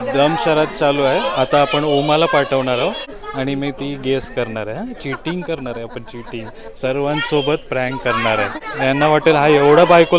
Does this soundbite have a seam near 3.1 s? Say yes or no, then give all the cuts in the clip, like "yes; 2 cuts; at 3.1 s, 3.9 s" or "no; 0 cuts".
yes; 2 cuts; at 3.1 s, 8.6 s